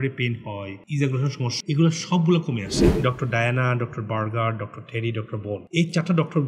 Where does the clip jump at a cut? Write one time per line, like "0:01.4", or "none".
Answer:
0:01.5
0:02.8